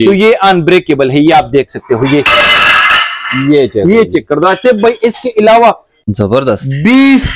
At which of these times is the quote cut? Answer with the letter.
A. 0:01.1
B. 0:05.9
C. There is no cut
B